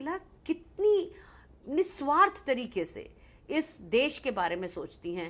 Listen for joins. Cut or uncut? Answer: uncut